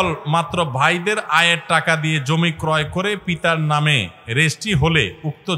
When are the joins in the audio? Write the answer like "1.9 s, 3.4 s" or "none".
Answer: none